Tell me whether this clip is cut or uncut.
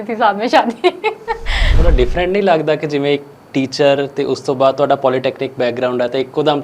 cut